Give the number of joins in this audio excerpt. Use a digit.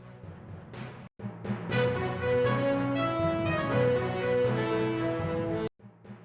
0